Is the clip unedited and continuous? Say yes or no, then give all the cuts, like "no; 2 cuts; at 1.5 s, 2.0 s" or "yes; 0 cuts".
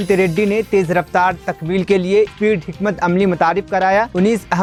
yes; 0 cuts